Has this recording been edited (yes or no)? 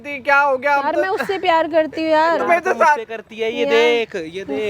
no